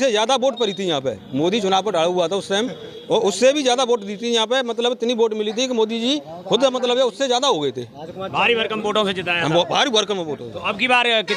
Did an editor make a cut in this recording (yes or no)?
no